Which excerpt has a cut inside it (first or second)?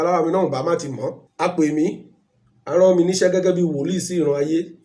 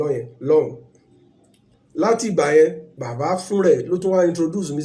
first